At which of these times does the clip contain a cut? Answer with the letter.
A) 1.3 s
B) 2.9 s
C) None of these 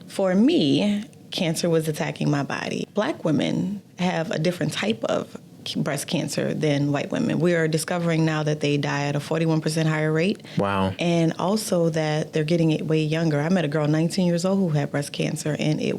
B